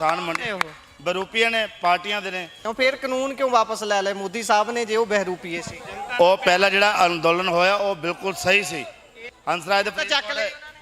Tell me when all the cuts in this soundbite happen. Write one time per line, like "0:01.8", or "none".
0:02.6
0:09.3